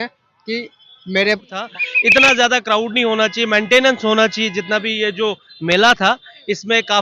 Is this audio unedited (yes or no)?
no